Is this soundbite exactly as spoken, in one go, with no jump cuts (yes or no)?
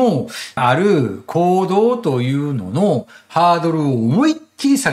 yes